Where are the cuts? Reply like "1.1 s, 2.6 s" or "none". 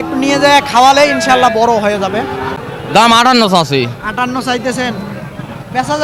2.6 s